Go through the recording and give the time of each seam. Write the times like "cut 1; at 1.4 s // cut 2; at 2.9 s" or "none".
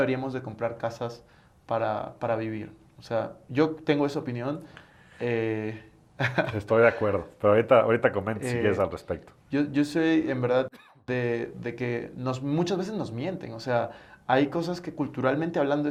none